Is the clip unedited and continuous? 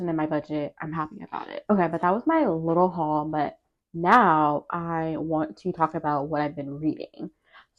yes; 0 cuts

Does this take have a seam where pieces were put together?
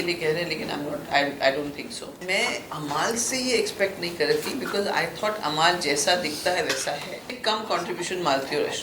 yes; 2 cuts; at 2.2 s, 7.3 s

